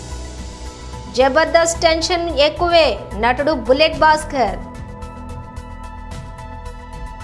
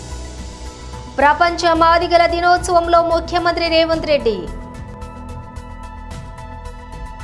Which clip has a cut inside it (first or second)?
second